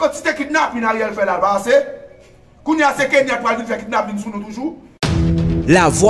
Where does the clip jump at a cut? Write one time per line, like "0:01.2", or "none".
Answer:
0:04.9